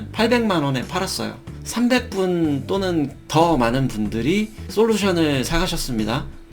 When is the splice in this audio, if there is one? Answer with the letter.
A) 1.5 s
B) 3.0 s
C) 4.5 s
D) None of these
A